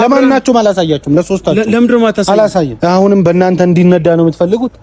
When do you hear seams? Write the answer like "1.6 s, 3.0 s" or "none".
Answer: 2.7 s